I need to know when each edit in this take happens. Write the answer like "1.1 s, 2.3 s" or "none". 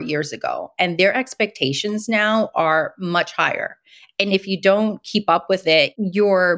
none